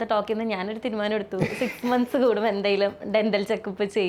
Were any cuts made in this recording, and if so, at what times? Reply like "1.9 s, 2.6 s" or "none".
none